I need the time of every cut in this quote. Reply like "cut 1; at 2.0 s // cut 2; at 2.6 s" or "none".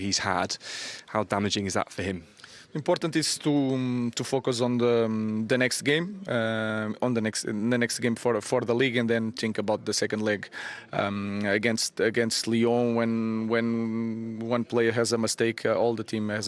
none